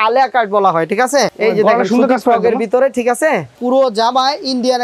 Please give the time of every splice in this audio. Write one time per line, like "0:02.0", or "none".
0:01.3
0:03.5